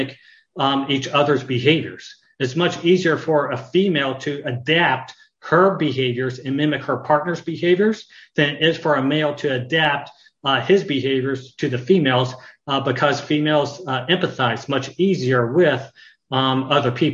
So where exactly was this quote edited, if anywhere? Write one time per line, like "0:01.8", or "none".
none